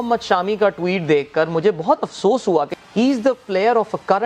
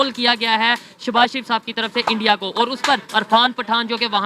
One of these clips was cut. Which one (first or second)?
first